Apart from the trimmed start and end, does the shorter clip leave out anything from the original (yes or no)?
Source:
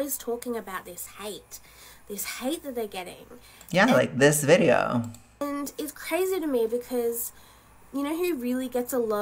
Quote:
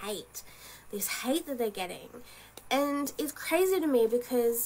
yes